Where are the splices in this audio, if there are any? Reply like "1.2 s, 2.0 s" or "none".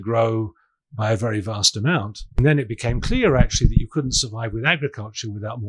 2.4 s